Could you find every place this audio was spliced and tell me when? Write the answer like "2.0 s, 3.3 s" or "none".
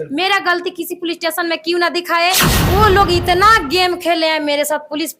2.5 s